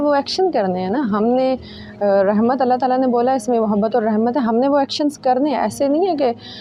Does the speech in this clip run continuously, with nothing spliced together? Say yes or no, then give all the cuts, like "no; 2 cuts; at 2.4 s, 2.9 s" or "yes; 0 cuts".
yes; 0 cuts